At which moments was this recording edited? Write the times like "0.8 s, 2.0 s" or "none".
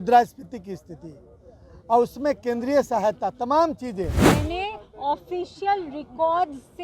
4.2 s